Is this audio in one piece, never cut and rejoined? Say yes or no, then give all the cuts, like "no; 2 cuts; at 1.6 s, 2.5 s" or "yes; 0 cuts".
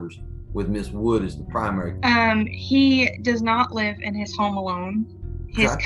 no; 1 cut; at 1.9 s